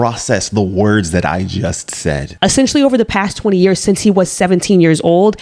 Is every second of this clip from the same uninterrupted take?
no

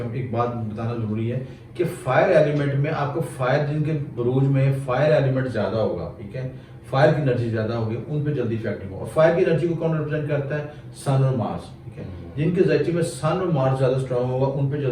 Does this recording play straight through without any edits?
yes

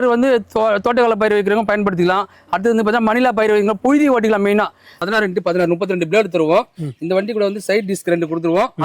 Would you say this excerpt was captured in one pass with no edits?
no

